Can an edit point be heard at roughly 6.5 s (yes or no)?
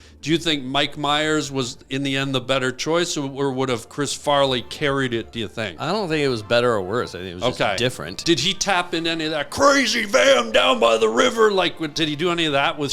no